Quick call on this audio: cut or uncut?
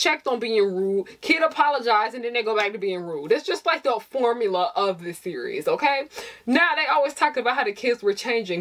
uncut